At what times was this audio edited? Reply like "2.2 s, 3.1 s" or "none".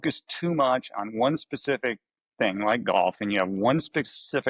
none